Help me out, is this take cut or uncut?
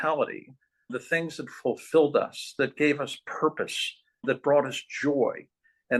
uncut